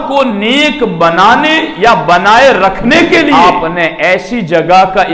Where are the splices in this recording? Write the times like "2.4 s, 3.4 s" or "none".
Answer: 3.3 s